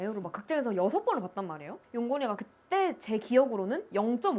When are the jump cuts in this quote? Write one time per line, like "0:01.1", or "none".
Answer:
none